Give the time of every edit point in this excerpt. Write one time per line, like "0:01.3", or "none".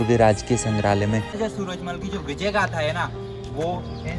0:01.4